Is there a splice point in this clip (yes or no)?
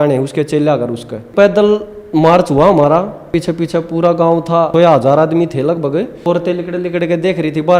yes